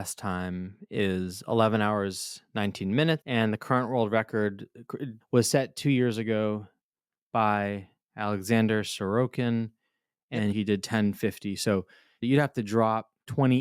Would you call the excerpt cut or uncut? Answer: cut